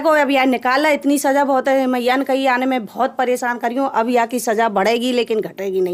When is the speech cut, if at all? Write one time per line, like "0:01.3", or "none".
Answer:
none